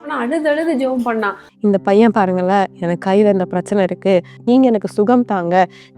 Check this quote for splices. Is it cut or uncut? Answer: cut